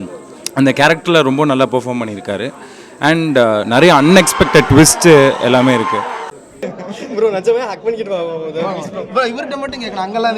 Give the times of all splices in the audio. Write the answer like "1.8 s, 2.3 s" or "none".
6.6 s